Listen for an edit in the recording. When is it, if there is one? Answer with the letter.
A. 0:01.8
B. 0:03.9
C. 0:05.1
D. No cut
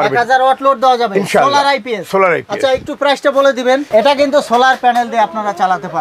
B